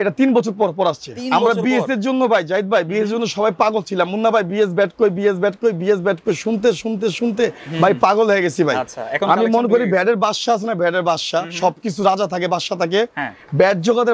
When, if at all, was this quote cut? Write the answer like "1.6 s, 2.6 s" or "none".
none